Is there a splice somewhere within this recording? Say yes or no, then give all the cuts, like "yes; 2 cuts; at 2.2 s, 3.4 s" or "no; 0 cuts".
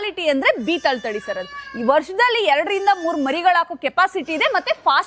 no; 0 cuts